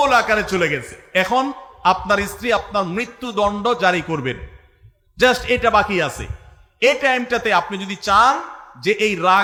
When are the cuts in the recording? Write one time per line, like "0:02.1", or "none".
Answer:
none